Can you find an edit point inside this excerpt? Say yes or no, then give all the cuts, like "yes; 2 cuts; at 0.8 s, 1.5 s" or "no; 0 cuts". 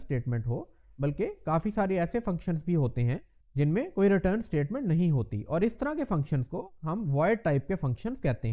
no; 0 cuts